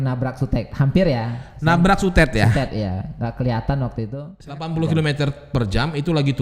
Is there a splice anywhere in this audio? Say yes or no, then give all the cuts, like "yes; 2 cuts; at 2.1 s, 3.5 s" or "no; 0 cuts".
yes; 1 cut; at 4.2 s